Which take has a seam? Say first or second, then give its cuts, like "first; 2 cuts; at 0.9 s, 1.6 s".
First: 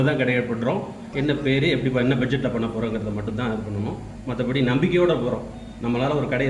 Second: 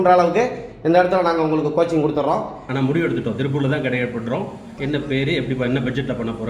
second; 1 cut; at 2.6 s